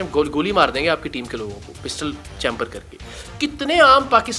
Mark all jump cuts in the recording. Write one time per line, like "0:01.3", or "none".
0:03.2